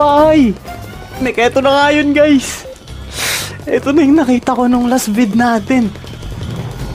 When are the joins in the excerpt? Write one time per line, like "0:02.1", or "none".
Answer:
0:01.2